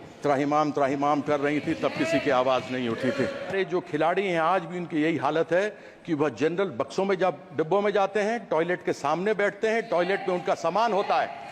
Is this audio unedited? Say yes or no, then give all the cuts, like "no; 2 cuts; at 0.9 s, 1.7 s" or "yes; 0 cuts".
no; 1 cut; at 3.5 s